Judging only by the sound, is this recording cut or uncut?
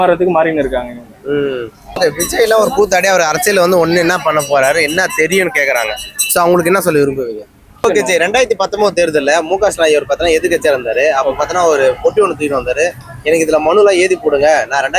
cut